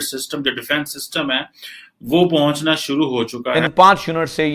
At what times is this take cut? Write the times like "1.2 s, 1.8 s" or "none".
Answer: 3.5 s